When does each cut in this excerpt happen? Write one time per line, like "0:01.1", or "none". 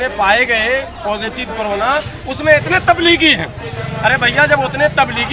none